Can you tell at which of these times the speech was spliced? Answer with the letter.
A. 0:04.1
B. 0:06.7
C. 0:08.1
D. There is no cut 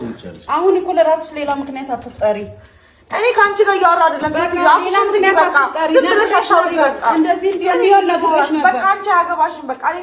D